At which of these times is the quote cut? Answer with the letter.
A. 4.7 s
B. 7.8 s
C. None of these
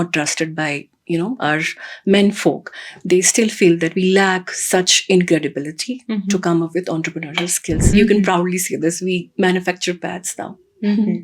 B